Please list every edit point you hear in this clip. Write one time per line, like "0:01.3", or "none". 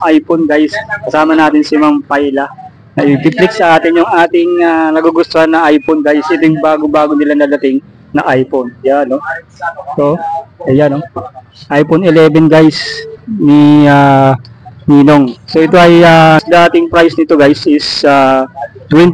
0:16.5

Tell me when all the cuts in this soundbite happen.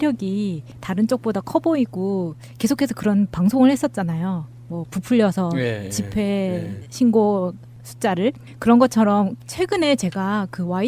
0:04.2

